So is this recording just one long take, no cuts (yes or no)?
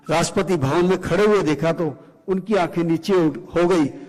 yes